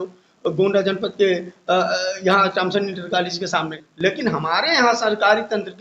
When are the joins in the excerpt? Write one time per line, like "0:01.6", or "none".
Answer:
0:03.7